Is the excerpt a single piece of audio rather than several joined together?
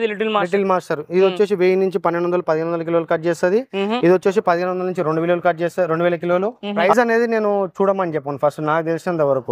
no; 1 cut; at 6.6 s

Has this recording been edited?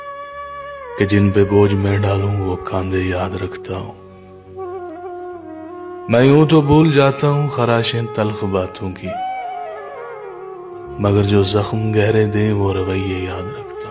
yes; 1 cut; at 1.0 s

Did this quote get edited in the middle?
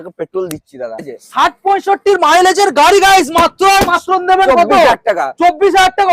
yes; 1 cut; at 1.2 s

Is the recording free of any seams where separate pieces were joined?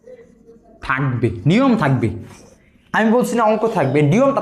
yes; 0 cuts

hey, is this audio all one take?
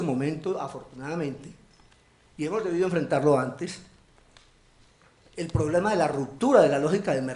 no; 1 cut; at 6.3 s

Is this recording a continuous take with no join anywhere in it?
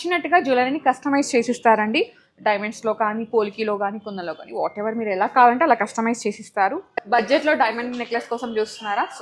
no; 1 cut; at 6.9 s

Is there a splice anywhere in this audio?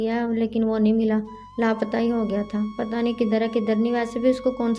no; 0 cuts

